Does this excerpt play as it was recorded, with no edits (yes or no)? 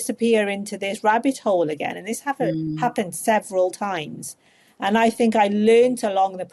yes